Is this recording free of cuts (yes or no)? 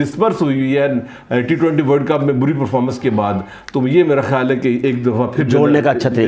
yes